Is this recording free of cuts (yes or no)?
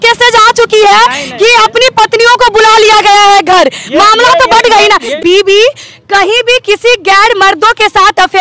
no